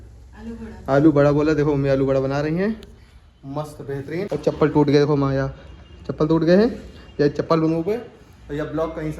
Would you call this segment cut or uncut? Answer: cut